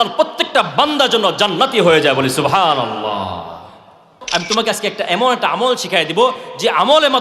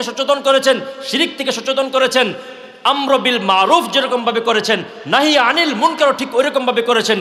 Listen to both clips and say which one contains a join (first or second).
first